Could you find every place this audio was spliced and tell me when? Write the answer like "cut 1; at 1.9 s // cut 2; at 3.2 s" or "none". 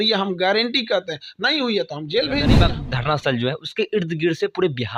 cut 1; at 2.6 s

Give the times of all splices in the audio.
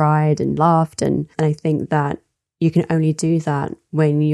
cut 1; at 1.3 s

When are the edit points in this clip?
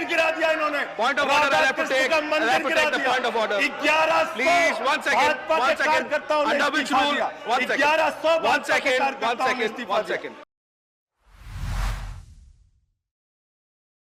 none

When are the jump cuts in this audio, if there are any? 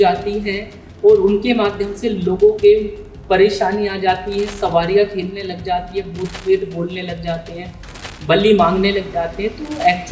none

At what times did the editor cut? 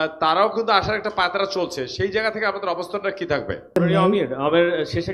cut 1; at 3.7 s

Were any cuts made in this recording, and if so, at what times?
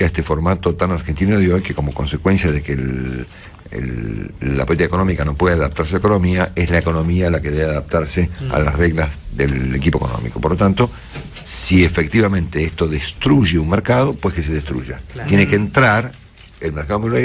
cut 1; at 8.3 s

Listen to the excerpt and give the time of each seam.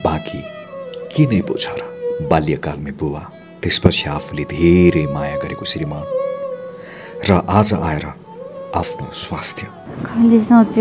cut 1; at 9.8 s

